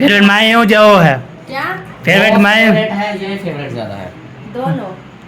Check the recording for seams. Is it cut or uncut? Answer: cut